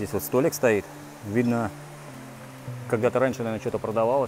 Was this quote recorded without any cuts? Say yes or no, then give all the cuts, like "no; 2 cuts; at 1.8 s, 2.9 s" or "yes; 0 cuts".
yes; 0 cuts